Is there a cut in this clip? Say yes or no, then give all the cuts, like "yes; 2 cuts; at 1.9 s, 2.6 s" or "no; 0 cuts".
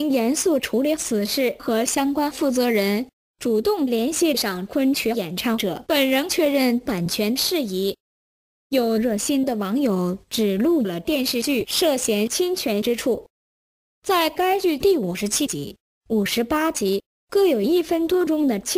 no; 0 cuts